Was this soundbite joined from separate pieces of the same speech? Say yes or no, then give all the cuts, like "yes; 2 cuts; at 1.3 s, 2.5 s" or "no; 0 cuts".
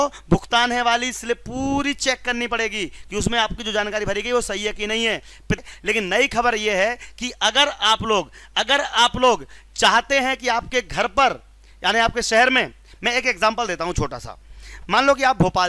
yes; 1 cut; at 5.6 s